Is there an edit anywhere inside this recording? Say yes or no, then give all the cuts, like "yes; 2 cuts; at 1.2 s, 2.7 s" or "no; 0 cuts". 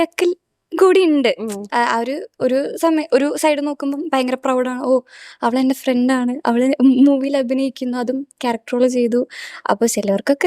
no; 0 cuts